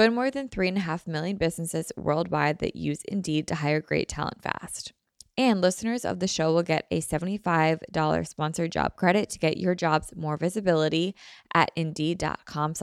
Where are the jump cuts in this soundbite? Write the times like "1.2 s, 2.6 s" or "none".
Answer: none